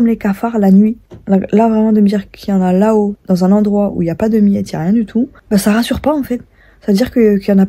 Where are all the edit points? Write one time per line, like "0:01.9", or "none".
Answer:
0:01.1
0:03.2
0:05.4

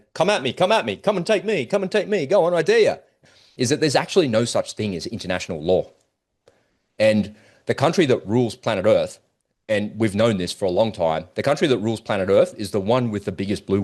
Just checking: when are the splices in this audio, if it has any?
0:03.1

